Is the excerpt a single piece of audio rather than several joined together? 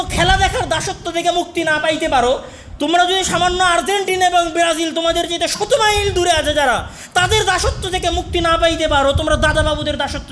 yes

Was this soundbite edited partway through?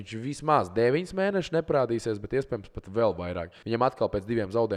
yes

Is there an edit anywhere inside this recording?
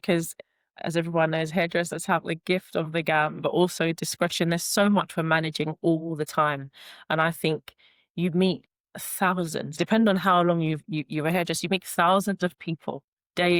no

